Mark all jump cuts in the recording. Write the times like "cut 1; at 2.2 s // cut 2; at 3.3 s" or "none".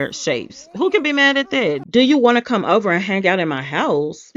cut 1; at 1.6 s